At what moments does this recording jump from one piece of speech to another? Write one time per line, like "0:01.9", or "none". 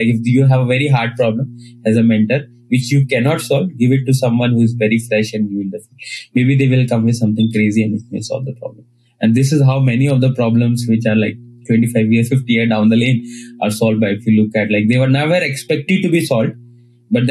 none